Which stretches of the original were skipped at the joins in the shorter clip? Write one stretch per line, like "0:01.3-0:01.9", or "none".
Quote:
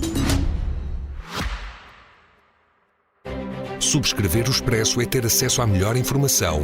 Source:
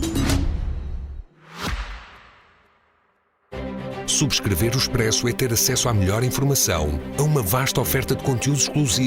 0:01.1-0:01.4

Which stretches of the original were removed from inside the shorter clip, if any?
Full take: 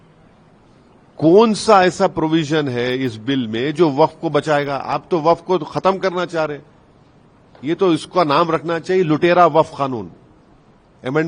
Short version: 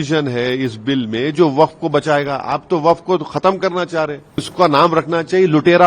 0:06.9-0:08.1

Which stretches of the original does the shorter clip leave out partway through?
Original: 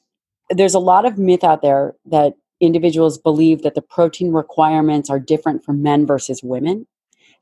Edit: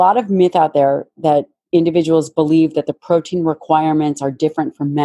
none

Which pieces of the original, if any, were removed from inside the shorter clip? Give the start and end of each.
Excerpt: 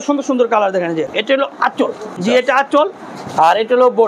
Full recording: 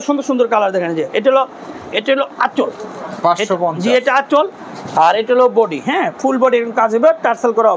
0:01.1-0:01.9
0:03.0-0:03.8

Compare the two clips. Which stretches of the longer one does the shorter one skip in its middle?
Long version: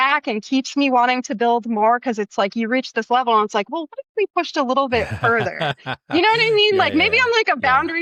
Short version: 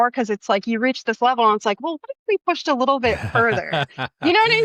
none

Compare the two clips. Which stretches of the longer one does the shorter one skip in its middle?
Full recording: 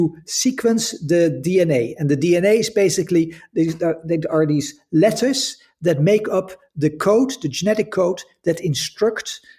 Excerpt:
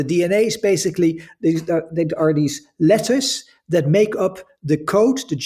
none

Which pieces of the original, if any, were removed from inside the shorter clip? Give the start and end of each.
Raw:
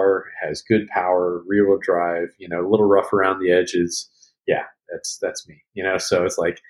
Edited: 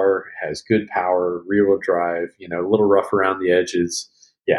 none

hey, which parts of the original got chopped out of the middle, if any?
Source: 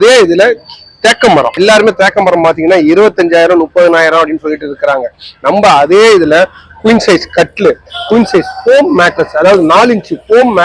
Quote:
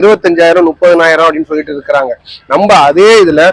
none

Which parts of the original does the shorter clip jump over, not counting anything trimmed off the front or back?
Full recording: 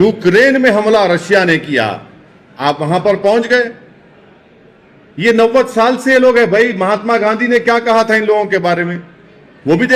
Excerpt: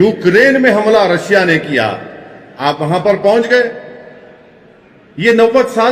none

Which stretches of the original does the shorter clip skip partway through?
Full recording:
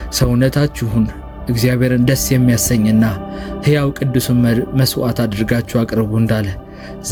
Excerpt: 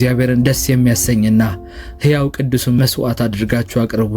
0:04.4-0:04.8

